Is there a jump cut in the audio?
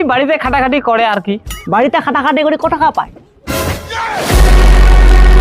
yes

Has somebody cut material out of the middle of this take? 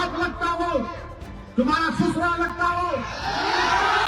no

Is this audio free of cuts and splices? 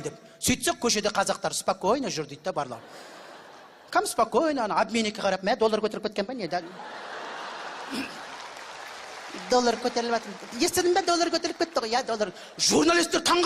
no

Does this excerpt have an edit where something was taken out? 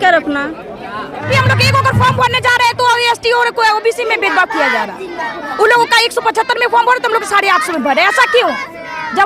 yes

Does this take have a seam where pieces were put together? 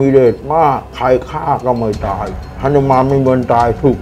no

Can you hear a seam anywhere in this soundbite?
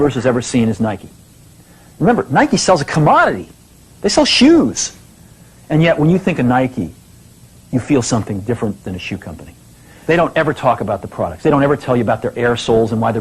yes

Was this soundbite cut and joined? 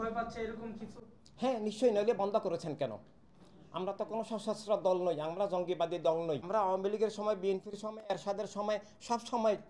yes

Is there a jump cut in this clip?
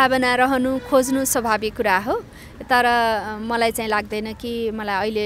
no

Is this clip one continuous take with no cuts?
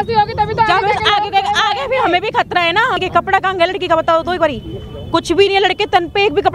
no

